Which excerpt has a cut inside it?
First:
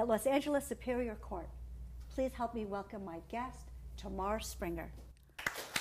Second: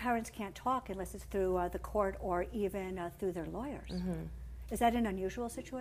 first; 1 cut; at 1.4 s

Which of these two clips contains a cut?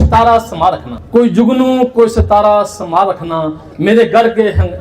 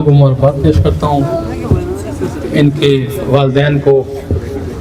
first; 1 cut; at 0.9 s

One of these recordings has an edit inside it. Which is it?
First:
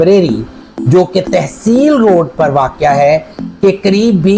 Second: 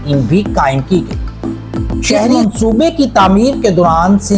second; 1 cut; at 2.3 s

